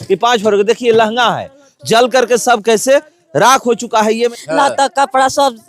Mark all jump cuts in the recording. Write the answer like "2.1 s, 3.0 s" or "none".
4.4 s